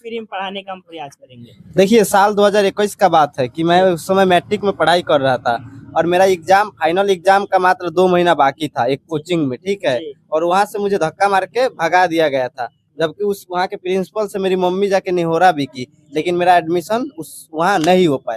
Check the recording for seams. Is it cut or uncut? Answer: uncut